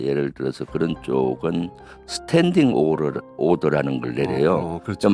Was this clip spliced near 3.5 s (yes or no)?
no